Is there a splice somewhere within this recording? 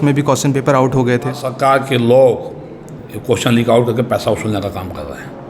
yes; 1 cut; at 1.5 s

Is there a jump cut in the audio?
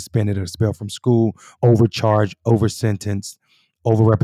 yes; 1 cut; at 1.5 s

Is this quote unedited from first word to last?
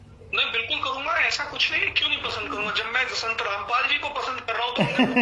yes; 0 cuts

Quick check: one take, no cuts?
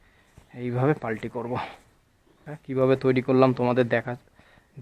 no; 1 cut; at 2.5 s

